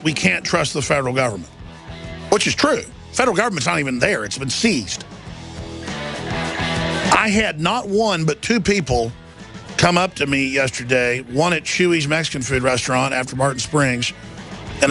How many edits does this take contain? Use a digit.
1